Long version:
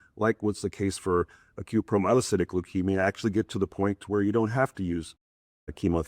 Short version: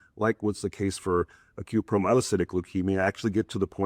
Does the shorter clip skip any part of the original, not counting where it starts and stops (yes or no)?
no